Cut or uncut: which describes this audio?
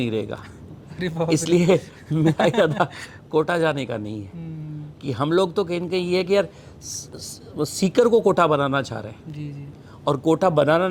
uncut